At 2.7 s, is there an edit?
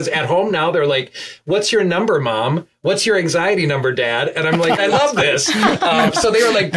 no; 1 cut; at 4.8 s

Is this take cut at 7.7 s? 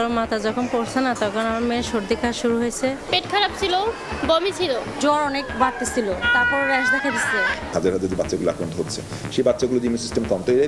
yes; 4 cuts; at 3.0 s, 4.9 s, 6.2 s, 7.7 s

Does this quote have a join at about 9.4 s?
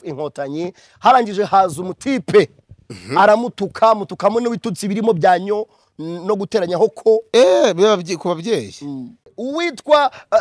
yes; 1 cut; at 9.4 s

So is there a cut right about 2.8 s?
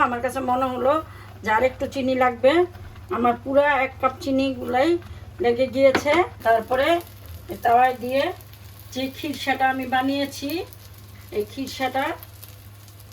no; 1 cut; at 6.3 s

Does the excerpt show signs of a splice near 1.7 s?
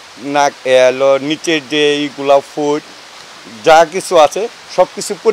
no; 0 cuts

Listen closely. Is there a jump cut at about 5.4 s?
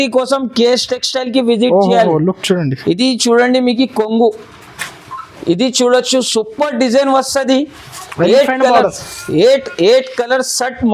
no; 0 cuts

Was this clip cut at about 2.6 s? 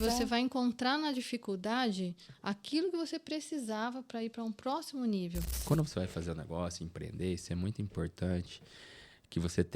no; 1 cut; at 5.6 s

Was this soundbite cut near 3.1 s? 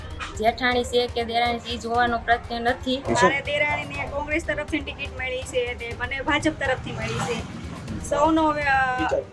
yes; 1 cut; at 3.1 s

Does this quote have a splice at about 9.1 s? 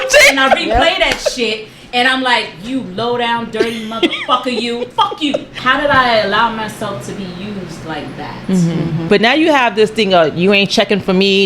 yes; 2 cuts; at 5.5 s, 9.1 s

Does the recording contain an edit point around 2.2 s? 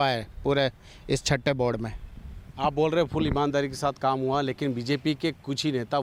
no; 0 cuts

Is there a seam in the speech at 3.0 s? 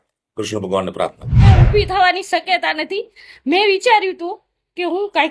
no; 1 cut; at 1.4 s

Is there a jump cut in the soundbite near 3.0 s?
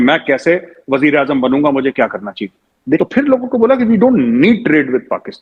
yes; 1 cut; at 3.0 s

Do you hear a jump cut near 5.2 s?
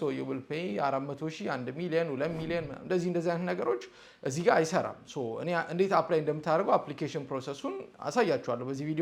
no; 0 cuts

